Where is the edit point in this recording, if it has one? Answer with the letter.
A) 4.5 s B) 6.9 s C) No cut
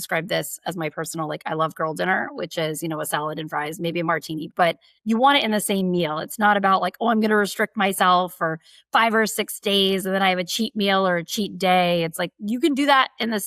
A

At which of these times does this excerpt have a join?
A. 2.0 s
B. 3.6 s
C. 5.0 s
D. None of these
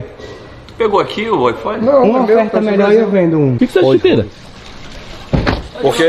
B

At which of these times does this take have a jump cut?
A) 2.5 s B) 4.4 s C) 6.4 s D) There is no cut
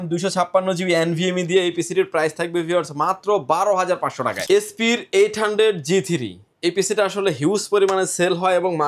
B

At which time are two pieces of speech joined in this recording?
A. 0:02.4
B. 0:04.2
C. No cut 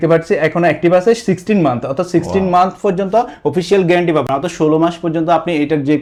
C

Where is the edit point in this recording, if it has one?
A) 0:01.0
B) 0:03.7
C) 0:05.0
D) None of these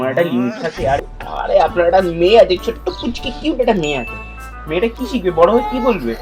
A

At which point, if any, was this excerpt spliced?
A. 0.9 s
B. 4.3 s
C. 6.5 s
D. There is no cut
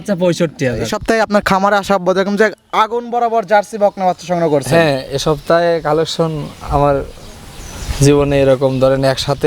A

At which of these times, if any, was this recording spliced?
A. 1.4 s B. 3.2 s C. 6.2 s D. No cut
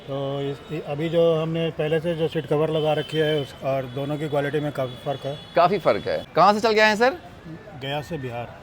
C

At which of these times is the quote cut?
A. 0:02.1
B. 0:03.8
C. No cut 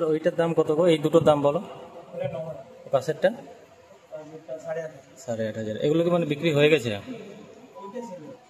C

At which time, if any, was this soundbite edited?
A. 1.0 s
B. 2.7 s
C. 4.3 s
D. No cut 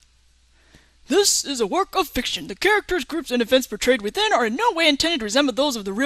D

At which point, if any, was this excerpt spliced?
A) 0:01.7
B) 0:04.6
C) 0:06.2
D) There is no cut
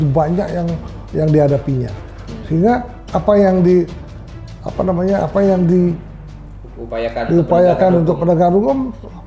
D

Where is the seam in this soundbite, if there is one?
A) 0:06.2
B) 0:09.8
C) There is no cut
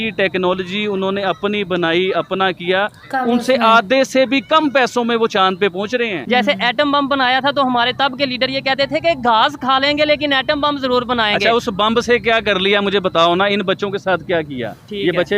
A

